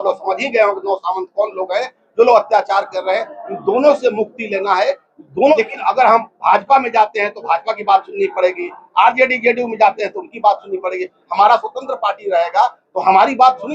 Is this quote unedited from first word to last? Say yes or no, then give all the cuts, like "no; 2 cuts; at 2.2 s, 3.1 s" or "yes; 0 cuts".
no; 1 cut; at 5.6 s